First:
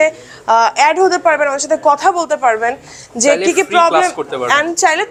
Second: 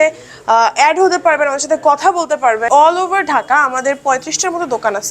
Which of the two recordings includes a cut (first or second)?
second